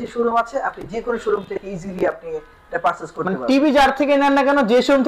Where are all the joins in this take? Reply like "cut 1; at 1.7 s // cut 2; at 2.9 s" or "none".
none